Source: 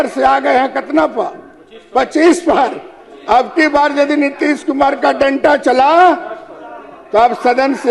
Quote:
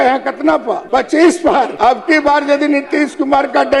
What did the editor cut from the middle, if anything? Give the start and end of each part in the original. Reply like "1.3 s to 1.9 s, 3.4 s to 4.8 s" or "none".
1.3 s to 1.9 s, 2.7 s to 3.2 s